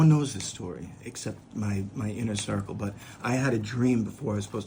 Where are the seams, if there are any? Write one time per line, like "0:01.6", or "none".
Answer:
none

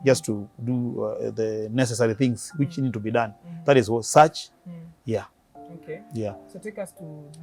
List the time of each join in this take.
none

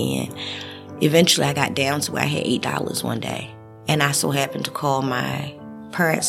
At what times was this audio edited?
0:03.8

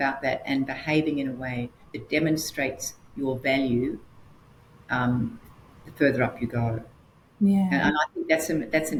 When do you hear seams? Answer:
none

